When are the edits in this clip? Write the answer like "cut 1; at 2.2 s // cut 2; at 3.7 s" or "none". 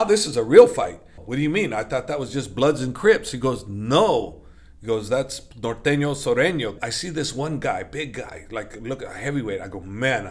cut 1; at 1.2 s // cut 2; at 6.8 s